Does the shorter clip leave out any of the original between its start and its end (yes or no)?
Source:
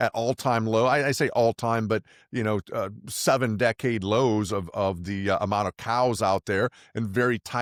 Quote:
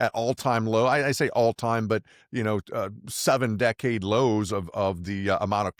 no